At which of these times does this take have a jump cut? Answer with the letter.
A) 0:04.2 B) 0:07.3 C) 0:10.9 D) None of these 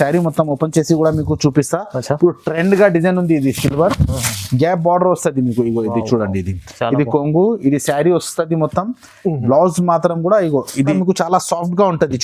C